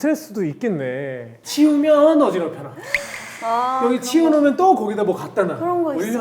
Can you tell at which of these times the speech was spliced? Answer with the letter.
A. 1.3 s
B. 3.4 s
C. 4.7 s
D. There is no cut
A